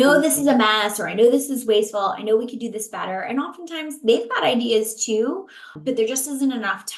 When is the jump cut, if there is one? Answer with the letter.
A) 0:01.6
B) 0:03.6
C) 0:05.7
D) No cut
C